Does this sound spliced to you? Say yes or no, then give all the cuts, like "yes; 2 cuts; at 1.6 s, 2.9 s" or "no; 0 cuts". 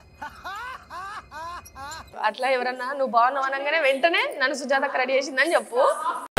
yes; 1 cut; at 2.1 s